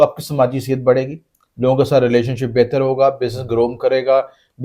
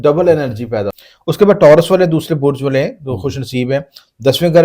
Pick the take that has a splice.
second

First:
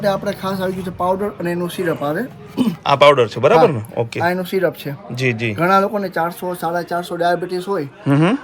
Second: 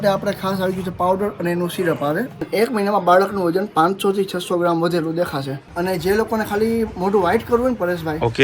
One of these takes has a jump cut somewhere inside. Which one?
second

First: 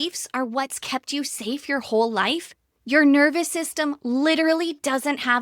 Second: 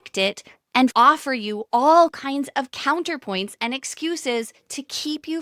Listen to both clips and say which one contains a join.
second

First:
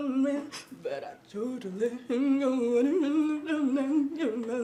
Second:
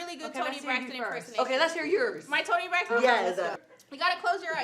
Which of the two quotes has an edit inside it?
second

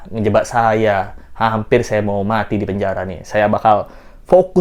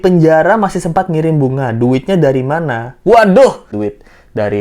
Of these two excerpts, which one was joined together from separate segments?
second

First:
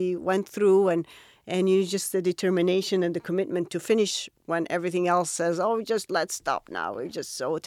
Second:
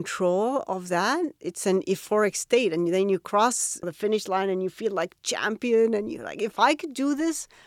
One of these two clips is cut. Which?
second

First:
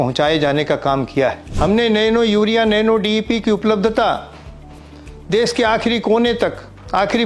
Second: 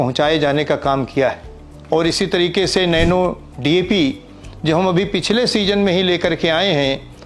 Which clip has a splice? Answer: first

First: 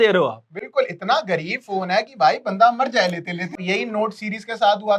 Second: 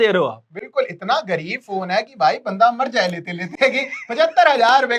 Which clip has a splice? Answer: first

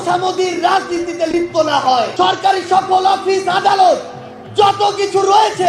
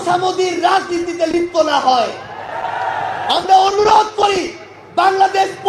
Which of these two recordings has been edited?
first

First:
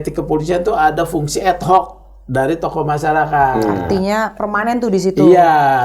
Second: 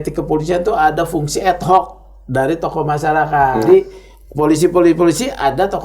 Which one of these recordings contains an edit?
second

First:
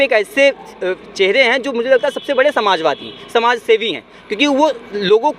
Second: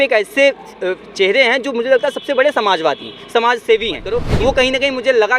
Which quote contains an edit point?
second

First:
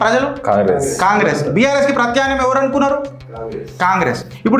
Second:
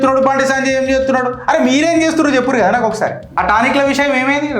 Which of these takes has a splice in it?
second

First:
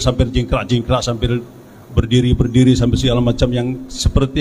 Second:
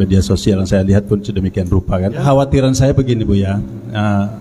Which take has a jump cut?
second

